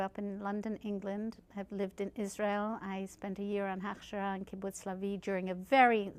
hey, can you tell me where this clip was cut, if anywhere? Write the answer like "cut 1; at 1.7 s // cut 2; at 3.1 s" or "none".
cut 1; at 2.5 s